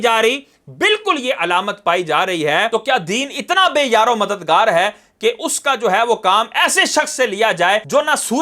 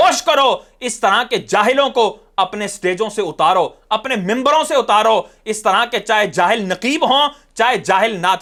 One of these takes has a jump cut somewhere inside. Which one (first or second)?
first